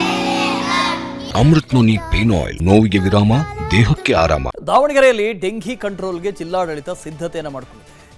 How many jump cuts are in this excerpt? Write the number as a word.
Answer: three